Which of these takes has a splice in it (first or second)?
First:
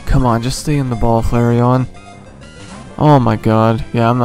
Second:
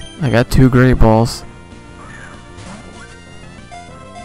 second